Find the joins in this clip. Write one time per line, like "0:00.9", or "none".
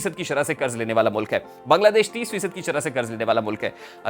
none